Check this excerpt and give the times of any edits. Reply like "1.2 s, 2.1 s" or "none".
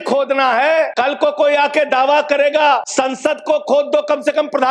0.9 s, 2.9 s